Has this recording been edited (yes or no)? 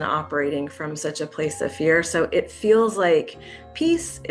no